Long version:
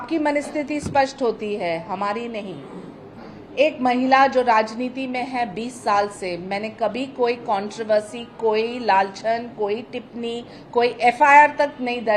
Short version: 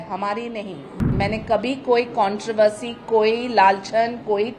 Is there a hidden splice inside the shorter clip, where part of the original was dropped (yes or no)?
yes